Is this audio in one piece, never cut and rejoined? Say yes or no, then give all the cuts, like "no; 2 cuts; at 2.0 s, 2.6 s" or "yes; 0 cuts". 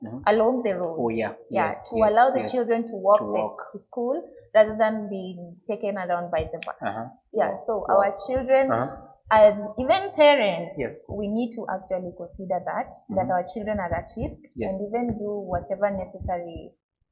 yes; 0 cuts